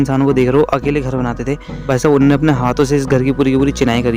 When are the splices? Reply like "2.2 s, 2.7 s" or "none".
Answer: 1.9 s